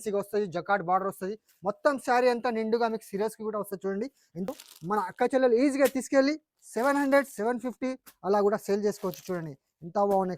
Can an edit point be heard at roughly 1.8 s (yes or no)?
no